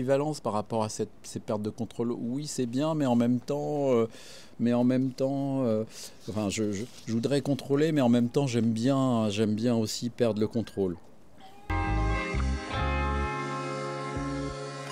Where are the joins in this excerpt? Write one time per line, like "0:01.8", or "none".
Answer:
0:11.6